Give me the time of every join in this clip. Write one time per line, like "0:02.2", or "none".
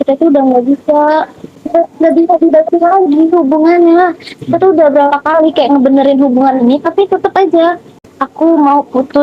0:08.0